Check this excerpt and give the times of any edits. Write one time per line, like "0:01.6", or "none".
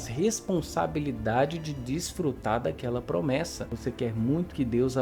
0:03.7